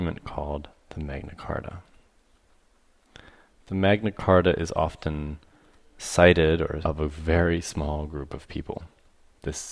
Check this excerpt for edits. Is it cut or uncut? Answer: uncut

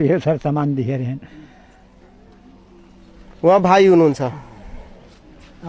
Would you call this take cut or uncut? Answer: uncut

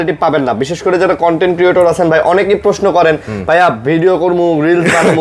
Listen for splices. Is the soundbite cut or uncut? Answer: uncut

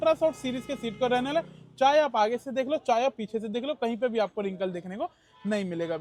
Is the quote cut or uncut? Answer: uncut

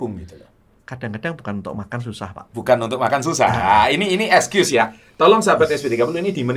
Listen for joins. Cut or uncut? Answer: uncut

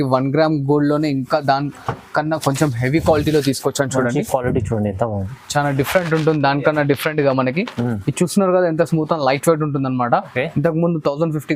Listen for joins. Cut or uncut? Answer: uncut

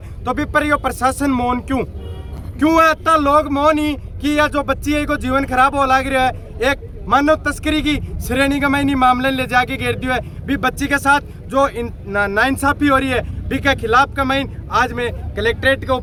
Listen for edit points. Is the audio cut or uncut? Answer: uncut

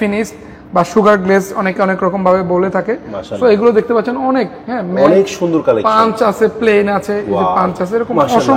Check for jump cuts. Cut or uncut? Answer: uncut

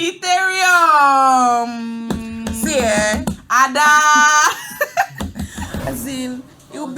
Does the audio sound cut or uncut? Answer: cut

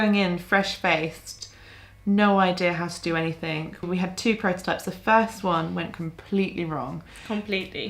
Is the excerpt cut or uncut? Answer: cut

